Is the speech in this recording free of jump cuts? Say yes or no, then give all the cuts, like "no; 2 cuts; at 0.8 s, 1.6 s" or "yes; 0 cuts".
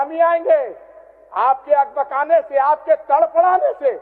yes; 0 cuts